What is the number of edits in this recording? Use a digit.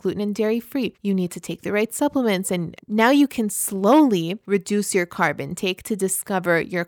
3